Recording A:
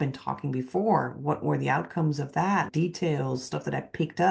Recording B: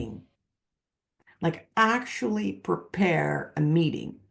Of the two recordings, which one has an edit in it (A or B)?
A